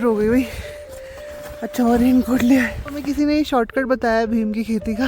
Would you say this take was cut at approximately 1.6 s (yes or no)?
no